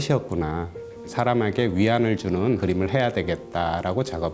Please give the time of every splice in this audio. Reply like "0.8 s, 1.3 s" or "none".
1.0 s, 2.6 s